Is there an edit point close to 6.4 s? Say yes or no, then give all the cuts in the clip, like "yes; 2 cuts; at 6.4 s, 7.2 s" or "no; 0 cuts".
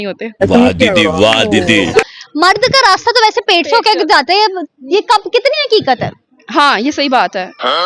no; 1 cut; at 2.1 s